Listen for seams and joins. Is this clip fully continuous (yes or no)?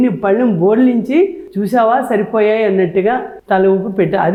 yes